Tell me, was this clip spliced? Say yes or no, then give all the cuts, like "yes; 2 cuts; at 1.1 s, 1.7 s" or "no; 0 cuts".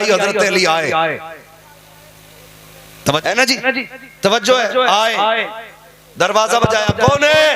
yes; 1 cut; at 3.2 s